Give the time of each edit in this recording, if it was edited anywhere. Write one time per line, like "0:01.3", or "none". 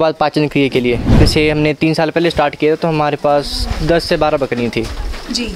0:01.1